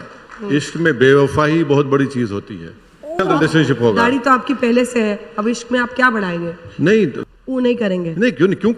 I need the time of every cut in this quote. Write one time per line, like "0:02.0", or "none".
0:03.2
0:07.2